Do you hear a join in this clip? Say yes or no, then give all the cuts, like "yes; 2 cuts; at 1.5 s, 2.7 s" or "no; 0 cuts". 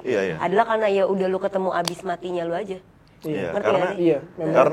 no; 0 cuts